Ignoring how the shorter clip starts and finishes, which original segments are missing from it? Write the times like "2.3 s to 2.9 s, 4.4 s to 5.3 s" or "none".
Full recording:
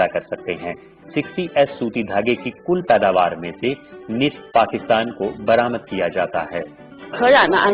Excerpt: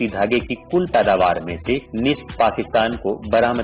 3.8 s to 4.0 s